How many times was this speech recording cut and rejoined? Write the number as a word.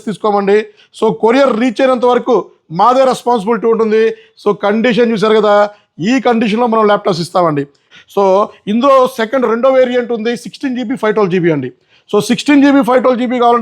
one